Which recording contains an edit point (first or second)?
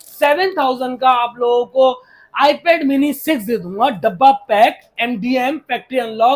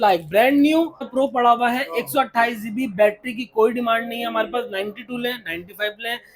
second